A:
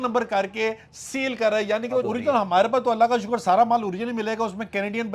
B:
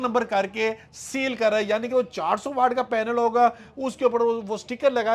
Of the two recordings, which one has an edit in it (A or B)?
A